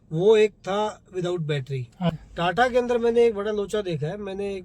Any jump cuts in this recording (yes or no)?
yes